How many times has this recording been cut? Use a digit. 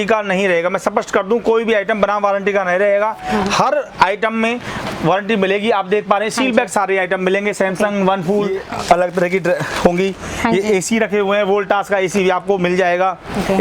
1